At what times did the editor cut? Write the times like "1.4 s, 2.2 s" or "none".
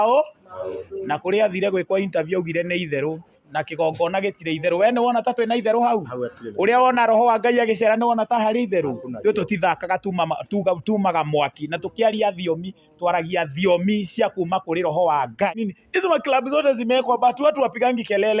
15.7 s